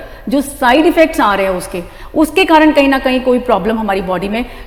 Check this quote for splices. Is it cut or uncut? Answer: uncut